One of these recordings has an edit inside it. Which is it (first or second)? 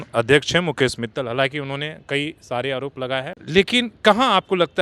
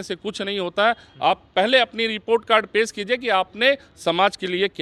first